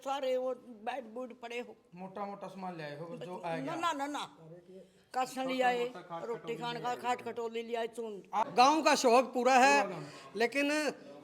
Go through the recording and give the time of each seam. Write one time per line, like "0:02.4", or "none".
0:08.5